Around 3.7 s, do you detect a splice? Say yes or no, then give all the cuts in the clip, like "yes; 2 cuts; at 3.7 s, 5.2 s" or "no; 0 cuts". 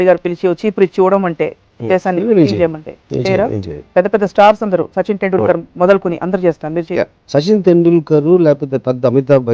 yes; 1 cut; at 3.7 s